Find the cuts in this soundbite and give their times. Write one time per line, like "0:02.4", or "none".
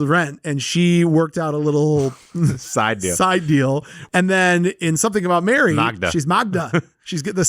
0:03.9